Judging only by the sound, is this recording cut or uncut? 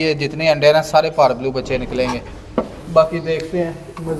uncut